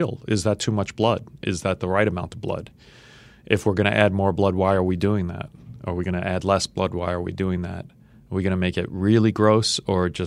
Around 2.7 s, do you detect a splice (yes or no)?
no